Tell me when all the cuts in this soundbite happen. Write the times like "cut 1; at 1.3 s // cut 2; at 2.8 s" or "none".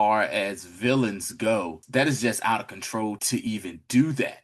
cut 1; at 1.8 s // cut 2; at 3.2 s